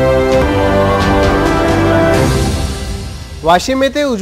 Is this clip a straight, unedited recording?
yes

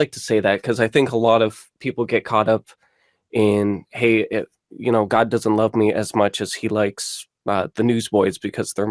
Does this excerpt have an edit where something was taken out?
no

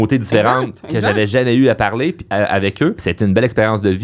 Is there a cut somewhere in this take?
yes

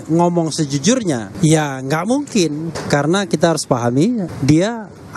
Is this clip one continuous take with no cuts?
no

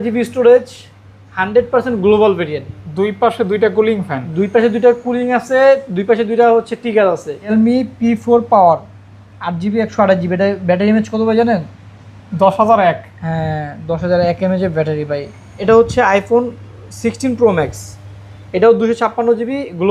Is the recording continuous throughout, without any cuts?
no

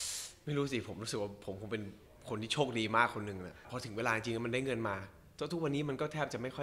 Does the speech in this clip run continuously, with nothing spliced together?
no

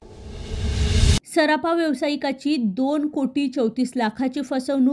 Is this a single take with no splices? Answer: yes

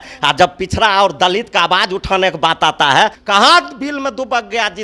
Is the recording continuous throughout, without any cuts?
no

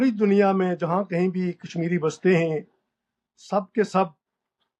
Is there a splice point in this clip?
no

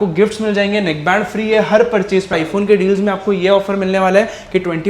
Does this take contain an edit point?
yes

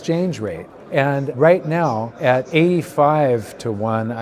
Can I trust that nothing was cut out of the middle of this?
no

